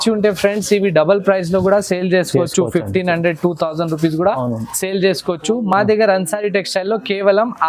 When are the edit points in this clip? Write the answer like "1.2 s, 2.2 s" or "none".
none